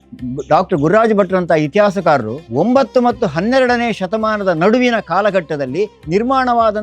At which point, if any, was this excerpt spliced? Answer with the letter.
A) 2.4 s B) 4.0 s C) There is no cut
A